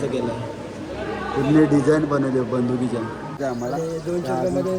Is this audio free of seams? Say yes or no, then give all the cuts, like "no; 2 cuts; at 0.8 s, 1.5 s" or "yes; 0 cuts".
no; 1 cut; at 3.4 s